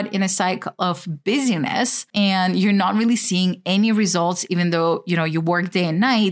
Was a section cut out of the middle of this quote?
yes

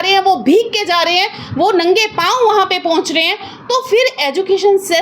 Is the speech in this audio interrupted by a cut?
no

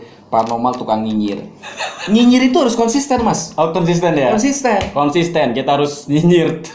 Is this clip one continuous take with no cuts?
no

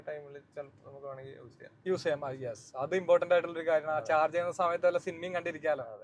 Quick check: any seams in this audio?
no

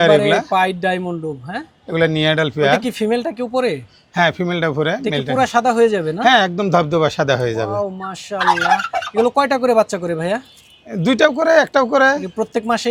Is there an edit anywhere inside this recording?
no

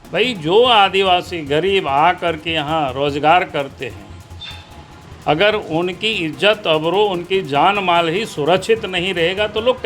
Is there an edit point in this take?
no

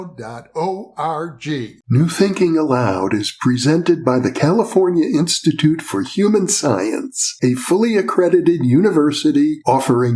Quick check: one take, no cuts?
no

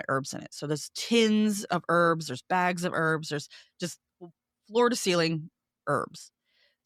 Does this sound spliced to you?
no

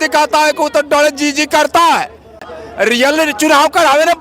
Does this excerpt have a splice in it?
yes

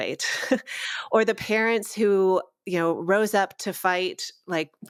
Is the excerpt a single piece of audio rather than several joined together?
yes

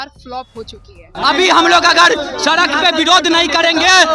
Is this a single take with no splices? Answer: no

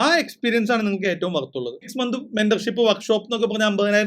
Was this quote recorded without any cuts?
no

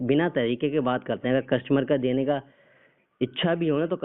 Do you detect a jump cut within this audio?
no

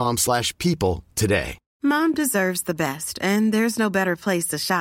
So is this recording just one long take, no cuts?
no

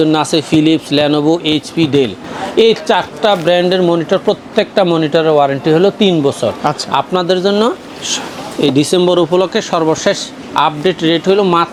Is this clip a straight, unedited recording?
yes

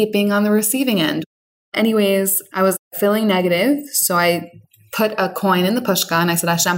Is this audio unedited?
no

